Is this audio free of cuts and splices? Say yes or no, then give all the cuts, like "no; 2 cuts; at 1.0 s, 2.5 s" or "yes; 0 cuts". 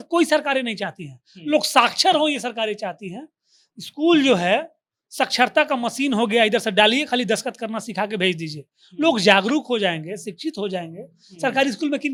yes; 0 cuts